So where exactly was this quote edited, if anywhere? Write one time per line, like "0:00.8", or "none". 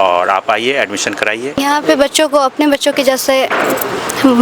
0:01.6